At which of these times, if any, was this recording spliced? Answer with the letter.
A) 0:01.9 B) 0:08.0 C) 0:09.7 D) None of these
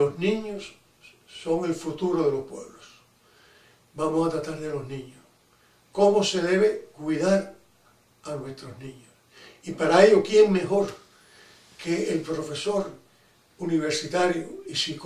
D